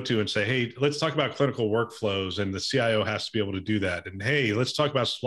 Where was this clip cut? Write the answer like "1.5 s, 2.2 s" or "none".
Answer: none

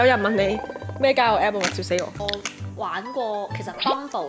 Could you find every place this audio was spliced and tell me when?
2.1 s

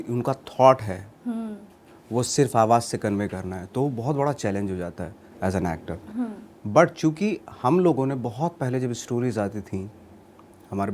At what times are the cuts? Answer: none

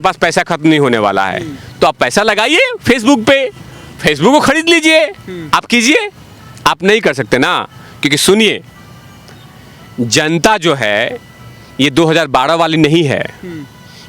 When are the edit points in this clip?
none

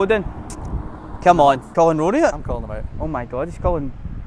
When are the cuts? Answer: 1.6 s

